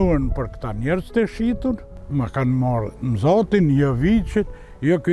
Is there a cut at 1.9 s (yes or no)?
yes